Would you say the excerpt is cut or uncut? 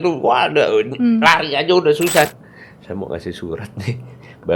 cut